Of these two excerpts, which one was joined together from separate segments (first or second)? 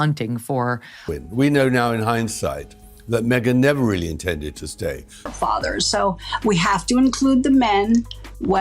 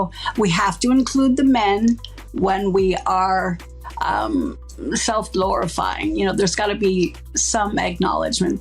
first